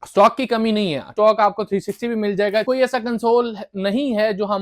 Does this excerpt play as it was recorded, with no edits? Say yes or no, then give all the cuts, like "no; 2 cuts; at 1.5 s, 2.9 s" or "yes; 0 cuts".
no; 2 cuts; at 1.1 s, 2.6 s